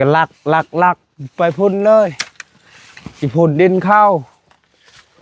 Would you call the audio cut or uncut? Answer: uncut